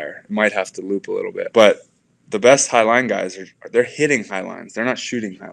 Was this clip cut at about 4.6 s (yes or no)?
no